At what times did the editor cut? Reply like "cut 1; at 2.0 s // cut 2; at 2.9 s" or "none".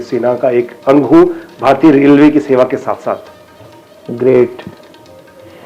none